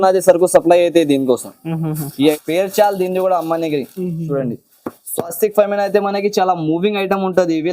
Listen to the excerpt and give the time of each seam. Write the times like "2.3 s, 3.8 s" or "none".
2.3 s

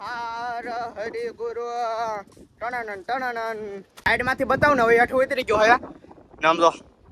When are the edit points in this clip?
3.9 s

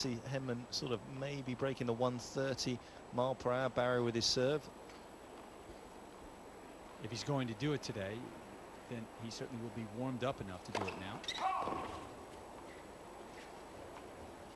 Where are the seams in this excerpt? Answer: 4.7 s

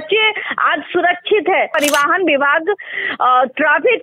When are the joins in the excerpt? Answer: 1.7 s

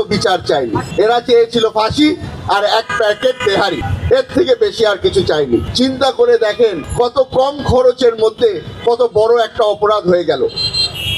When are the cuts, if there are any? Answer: none

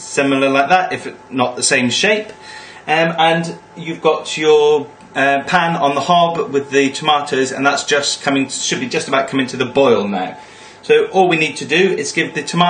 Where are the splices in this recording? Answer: none

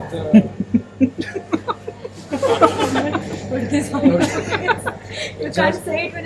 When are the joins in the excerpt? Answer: 2.3 s

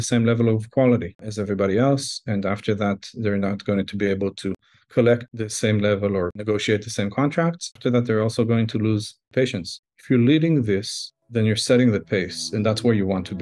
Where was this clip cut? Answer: none

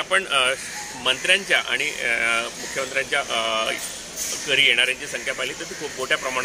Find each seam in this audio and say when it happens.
none

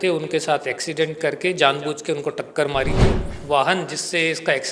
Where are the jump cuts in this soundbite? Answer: 3.3 s

